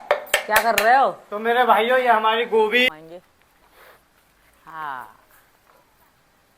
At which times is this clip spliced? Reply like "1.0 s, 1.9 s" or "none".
2.9 s